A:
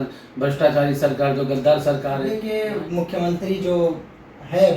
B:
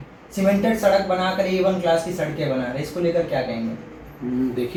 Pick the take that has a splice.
A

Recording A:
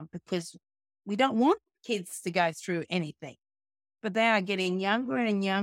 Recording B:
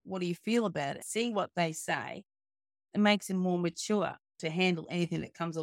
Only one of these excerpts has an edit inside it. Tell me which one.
B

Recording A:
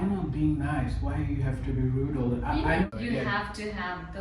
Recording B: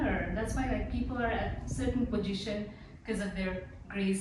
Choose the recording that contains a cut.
A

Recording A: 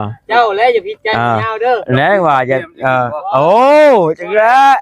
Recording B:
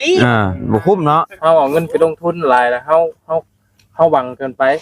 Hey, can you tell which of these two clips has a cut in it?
B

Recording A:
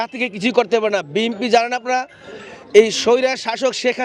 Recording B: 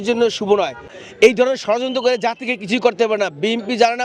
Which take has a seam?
B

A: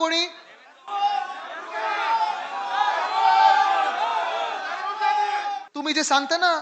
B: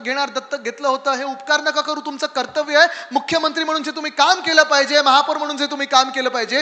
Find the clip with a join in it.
A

